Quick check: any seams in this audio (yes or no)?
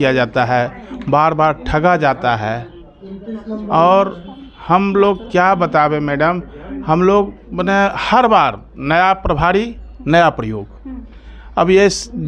no